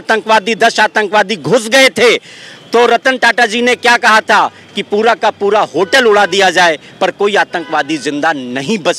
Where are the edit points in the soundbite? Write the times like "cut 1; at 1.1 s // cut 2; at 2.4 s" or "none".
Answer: none